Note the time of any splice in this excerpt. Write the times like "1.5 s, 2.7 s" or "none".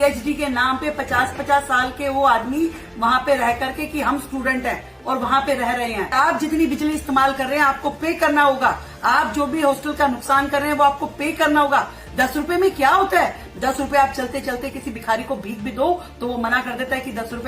none

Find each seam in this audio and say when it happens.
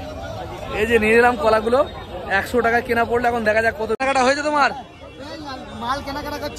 4.0 s

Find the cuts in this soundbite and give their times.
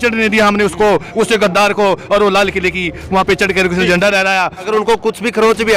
4.7 s

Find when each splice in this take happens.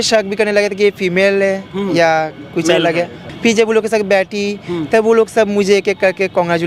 3.2 s

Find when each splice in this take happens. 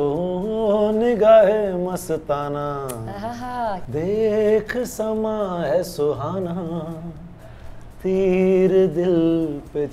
3.8 s

